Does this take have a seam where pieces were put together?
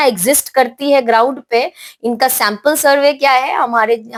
no; 0 cuts

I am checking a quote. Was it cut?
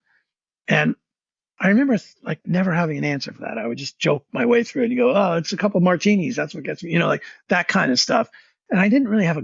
yes; 1 cut; at 2.4 s

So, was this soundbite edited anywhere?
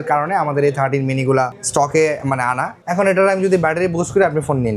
yes; 2 cuts; at 1.6 s, 2.8 s

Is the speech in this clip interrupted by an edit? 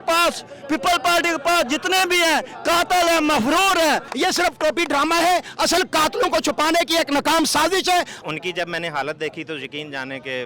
yes; 2 cuts; at 4.1 s, 8.2 s

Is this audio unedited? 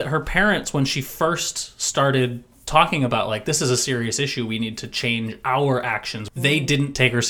no; 1 cut; at 6.2 s

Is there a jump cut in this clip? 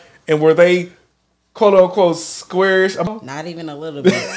yes; 1 cut; at 3.1 s

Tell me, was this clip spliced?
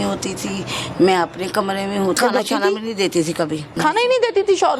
yes; 2 cuts; at 2.2 s, 3.8 s

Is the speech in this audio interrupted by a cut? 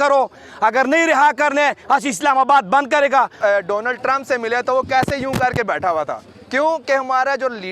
yes; 1 cut; at 3.3 s

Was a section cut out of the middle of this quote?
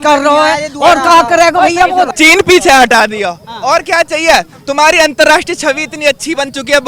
yes; 1 cut; at 2.1 s

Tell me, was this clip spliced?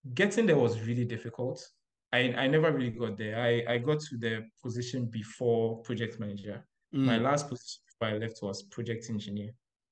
no; 0 cuts

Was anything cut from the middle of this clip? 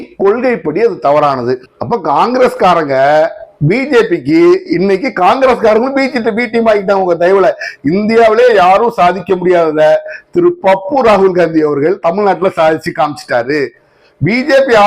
yes; 1 cut; at 1.7 s

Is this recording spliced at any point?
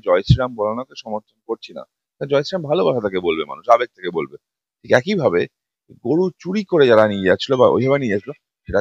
no; 0 cuts

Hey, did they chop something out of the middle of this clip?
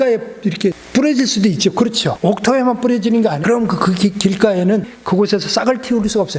yes; 4 cuts; at 0.8 s, 2.1 s, 3.4 s, 4.9 s

